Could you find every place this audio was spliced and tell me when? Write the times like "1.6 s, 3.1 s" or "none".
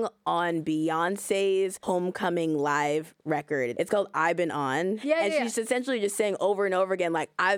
1.8 s, 3.7 s, 5.0 s